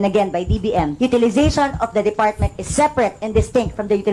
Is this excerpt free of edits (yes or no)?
no